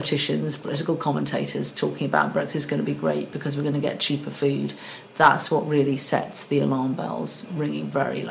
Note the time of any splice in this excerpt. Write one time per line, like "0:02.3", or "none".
0:07.4